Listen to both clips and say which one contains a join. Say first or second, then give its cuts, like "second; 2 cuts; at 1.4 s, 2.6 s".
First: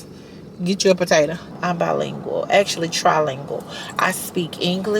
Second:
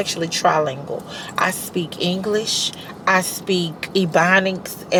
first; 1 cut; at 1.5 s